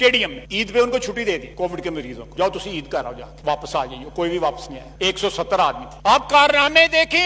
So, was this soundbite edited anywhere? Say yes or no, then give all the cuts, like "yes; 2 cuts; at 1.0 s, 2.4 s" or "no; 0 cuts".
no; 0 cuts